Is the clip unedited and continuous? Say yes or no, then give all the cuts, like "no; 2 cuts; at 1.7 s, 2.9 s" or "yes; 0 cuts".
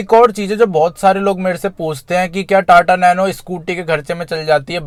yes; 0 cuts